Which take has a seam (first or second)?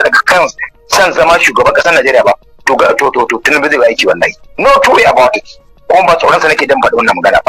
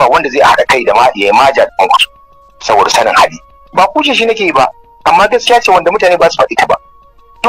first